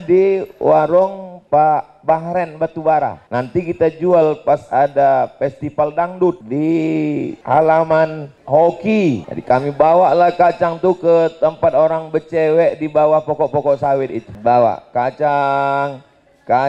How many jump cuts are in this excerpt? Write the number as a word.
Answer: seven